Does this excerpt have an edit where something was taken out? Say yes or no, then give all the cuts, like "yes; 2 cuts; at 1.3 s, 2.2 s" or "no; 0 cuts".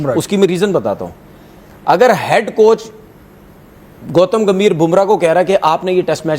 no; 0 cuts